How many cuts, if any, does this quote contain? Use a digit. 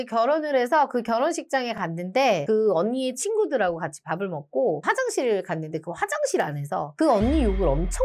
1